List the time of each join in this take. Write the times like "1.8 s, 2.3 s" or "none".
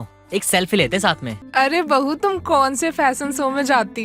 1.3 s